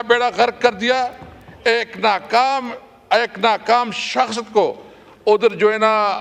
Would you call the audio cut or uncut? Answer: uncut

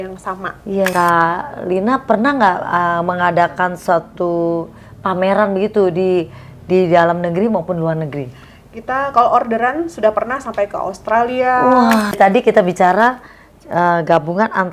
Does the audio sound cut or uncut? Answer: cut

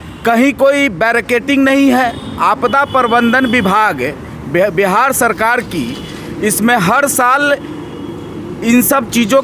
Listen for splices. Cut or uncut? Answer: uncut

